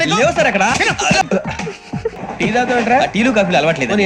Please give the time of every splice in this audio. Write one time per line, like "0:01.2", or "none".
0:02.2